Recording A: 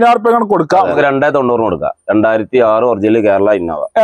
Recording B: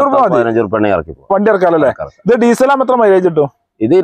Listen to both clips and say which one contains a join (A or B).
A